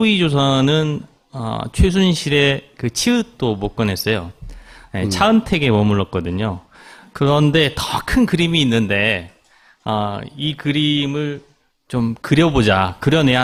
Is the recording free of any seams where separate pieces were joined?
yes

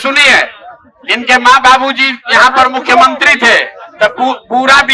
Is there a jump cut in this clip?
no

